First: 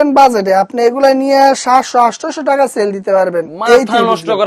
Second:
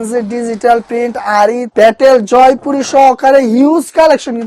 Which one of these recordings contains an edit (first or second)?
second